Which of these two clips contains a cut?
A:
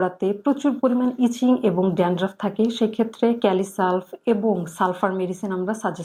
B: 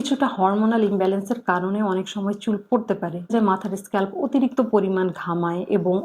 B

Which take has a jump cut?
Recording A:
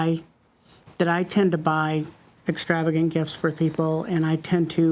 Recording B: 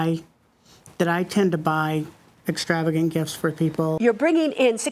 B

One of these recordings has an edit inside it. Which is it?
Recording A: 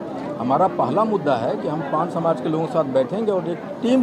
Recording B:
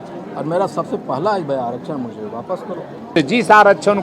B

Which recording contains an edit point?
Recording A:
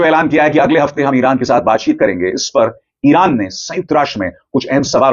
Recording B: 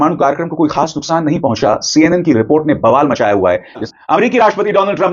B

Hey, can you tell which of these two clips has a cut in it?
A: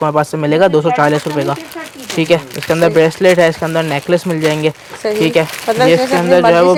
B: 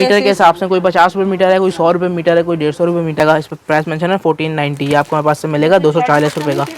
B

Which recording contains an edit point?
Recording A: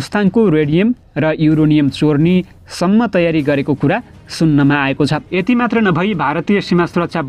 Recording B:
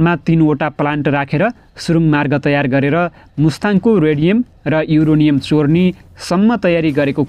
A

